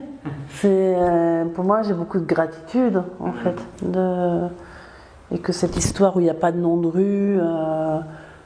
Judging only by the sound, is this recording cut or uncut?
uncut